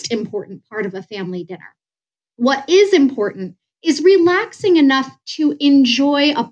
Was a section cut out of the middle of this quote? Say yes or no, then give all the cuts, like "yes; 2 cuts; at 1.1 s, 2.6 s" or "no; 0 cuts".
no; 0 cuts